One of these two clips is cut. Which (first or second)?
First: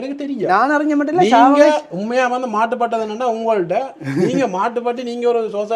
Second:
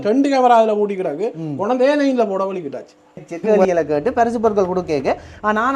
second